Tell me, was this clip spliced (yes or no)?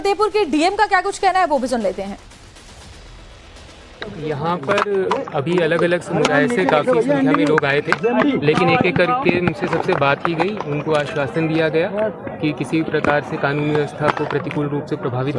no